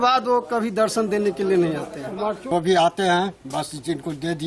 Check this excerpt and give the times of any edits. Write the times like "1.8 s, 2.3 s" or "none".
2.4 s